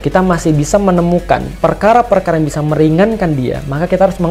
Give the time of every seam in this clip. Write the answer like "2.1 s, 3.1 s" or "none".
none